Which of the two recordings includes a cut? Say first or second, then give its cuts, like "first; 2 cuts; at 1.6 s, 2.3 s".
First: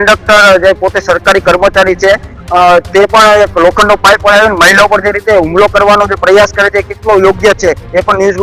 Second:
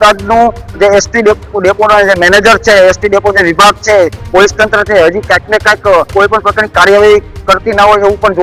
second; 1 cut; at 6.1 s